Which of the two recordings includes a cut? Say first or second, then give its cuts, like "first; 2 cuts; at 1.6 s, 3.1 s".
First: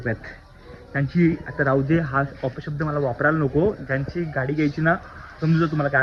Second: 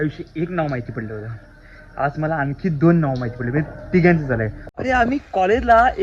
second; 1 cut; at 4.7 s